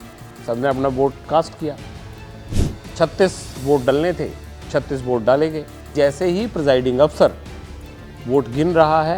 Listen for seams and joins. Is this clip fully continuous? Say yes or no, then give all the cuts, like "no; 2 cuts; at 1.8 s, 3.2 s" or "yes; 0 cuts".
no; 1 cut; at 5.8 s